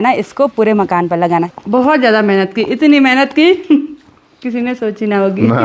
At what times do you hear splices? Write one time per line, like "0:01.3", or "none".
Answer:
0:01.5

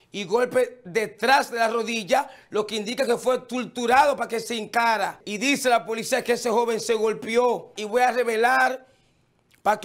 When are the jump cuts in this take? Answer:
0:05.3
0:07.8

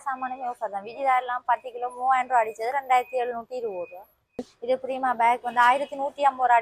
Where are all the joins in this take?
0:04.5

